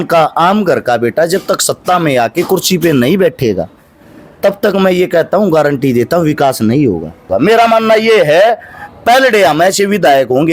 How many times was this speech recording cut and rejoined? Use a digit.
1